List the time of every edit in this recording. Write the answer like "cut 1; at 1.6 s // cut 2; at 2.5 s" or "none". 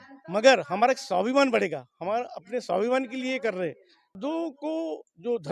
cut 1; at 4.2 s